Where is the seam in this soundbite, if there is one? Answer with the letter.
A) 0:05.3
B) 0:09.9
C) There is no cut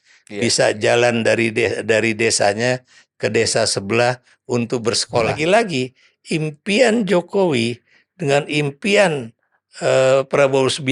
A